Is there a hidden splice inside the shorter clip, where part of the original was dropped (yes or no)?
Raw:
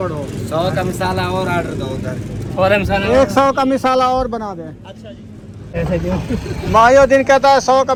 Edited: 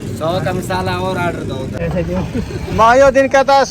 yes